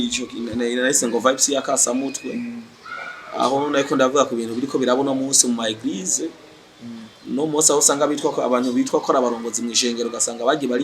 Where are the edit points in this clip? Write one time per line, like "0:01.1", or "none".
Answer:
none